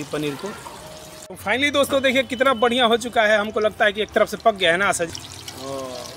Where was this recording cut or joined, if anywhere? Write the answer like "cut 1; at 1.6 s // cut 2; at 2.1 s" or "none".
cut 1; at 1.2 s // cut 2; at 5.1 s